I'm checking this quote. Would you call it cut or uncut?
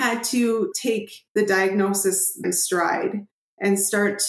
cut